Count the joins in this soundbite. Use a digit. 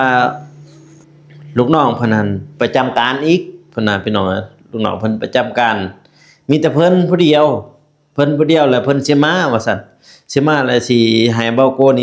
0